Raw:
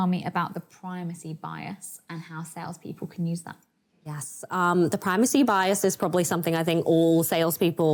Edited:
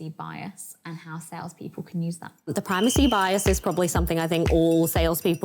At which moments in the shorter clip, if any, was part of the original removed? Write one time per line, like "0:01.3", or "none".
0:02.5